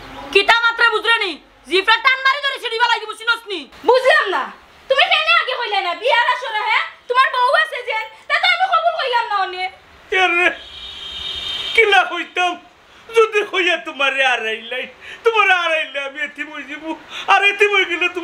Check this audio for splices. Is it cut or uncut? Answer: uncut